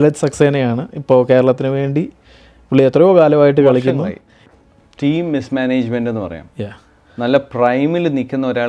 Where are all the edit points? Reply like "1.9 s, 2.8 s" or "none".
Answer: 4.4 s